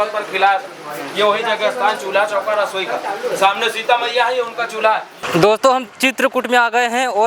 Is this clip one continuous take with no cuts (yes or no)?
no